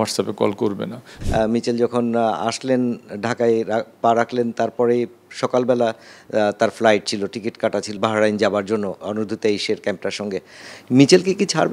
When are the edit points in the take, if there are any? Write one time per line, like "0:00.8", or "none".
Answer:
0:01.1
0:07.9
0:09.0
0:10.6